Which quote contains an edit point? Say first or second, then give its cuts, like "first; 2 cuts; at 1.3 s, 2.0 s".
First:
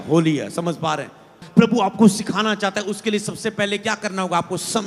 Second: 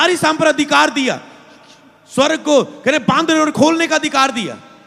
first; 1 cut; at 1.4 s